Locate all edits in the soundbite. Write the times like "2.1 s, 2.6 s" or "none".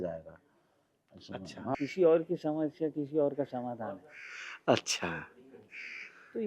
1.7 s